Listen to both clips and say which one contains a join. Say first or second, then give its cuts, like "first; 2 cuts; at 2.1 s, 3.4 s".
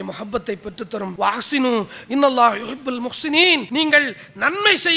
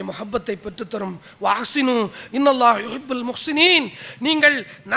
first; 2 cuts; at 1.1 s, 3.7 s